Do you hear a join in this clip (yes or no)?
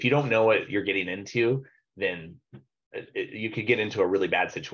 no